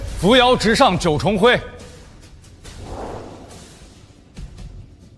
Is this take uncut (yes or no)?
yes